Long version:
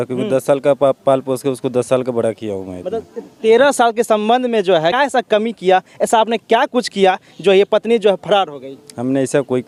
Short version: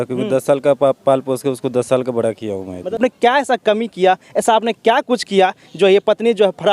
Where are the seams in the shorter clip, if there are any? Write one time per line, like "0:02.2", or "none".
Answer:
0:03.3